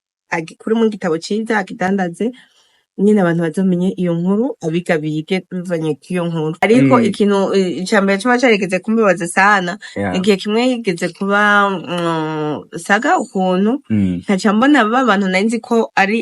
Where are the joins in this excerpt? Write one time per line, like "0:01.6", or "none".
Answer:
0:06.6